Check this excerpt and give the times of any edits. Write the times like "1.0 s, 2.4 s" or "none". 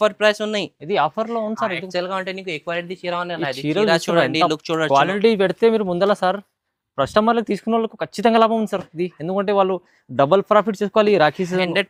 none